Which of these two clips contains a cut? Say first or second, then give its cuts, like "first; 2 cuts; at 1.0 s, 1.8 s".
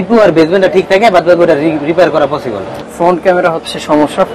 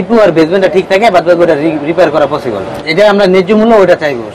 first; 1 cut; at 2.8 s